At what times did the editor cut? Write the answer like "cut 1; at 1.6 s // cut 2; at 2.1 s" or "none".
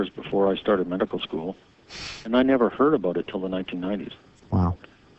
cut 1; at 1.7 s